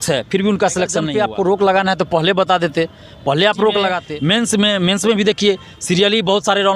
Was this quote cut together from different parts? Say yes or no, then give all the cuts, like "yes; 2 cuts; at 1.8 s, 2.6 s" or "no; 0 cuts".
yes; 2 cuts; at 1.1 s, 4.1 s